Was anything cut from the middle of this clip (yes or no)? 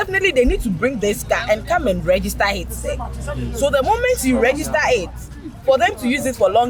no